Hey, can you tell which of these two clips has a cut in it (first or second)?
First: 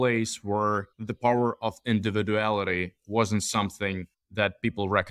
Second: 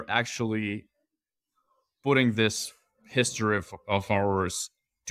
first